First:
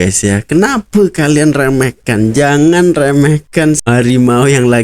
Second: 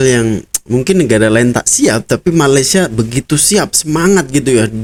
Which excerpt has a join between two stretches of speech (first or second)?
first